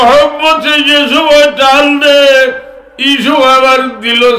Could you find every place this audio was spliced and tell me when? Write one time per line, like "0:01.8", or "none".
none